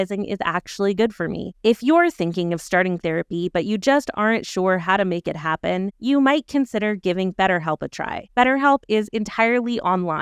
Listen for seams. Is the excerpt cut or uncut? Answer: uncut